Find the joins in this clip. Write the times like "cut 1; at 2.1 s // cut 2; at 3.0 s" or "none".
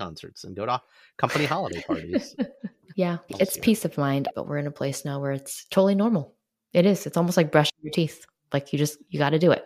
cut 1; at 3.2 s // cut 2; at 4.3 s